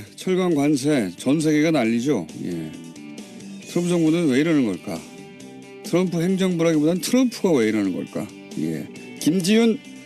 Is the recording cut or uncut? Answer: uncut